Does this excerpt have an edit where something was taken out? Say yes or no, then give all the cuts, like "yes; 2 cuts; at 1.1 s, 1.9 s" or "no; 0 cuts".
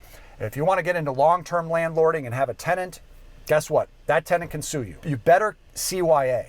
yes; 1 cut; at 5.0 s